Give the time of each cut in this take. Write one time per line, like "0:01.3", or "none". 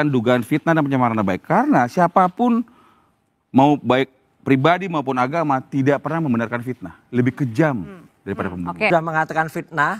0:08.9